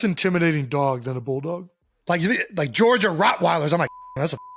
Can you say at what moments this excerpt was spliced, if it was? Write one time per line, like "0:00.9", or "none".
none